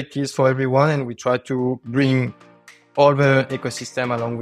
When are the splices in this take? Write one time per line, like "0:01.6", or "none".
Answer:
none